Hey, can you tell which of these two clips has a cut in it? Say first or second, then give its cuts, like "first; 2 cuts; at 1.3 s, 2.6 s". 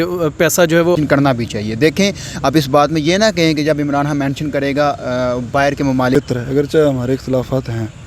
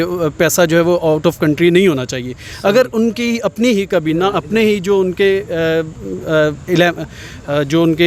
first; 2 cuts; at 1.0 s, 6.2 s